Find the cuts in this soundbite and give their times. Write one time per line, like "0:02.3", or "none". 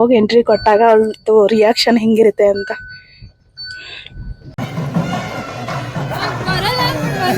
0:04.5